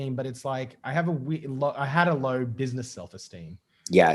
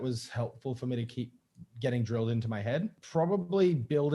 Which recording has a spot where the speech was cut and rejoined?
second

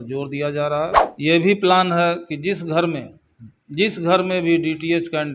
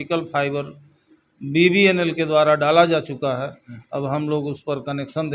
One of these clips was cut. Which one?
first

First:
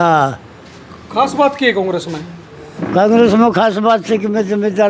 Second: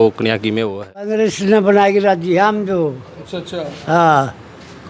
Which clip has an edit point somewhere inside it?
second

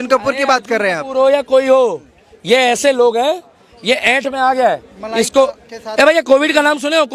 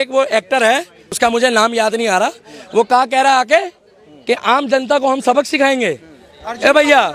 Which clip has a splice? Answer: second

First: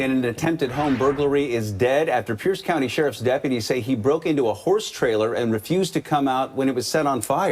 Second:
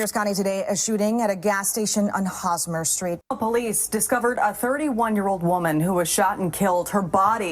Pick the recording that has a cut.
second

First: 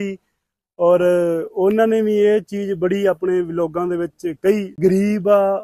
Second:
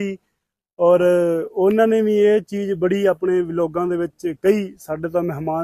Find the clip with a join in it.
first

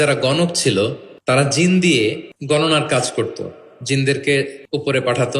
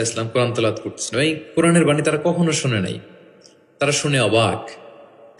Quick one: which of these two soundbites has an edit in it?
first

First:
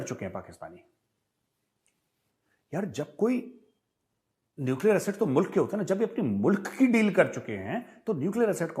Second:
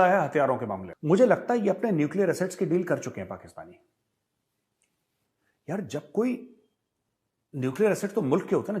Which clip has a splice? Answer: second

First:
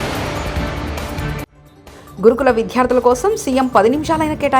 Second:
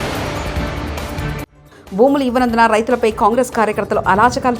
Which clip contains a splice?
first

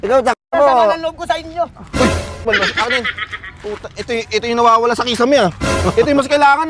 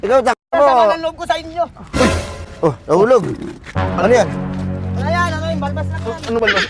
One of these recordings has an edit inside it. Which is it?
first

